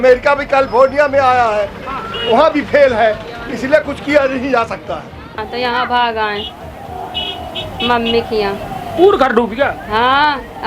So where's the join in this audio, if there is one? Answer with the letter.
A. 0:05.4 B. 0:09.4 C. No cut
A